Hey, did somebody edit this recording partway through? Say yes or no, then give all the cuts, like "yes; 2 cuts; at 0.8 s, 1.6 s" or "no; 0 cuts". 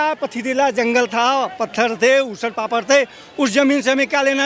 no; 0 cuts